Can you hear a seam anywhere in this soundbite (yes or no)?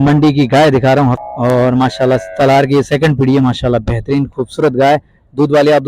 no